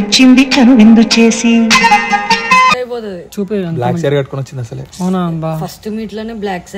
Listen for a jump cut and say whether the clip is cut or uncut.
cut